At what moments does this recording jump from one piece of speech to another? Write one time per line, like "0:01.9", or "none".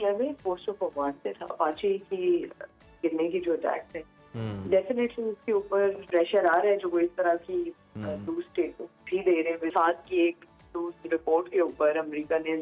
0:01.5
0:06.1
0:09.7